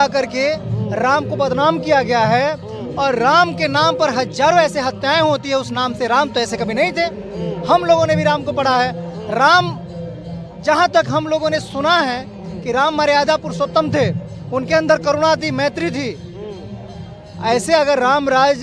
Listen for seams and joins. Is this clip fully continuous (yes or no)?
yes